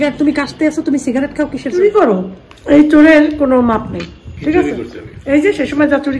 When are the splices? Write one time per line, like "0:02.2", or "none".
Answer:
0:01.8